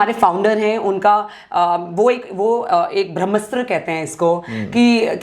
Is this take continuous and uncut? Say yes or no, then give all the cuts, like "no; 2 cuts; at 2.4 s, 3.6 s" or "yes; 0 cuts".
yes; 0 cuts